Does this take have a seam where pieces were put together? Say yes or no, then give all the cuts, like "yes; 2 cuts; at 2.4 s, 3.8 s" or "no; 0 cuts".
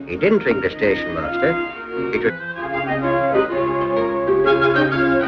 no; 0 cuts